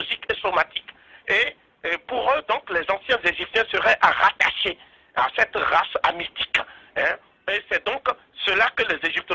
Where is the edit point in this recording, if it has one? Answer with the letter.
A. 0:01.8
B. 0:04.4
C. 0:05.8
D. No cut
C